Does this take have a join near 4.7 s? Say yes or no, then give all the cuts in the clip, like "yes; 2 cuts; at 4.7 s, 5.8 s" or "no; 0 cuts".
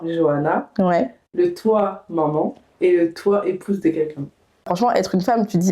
yes; 1 cut; at 4.7 s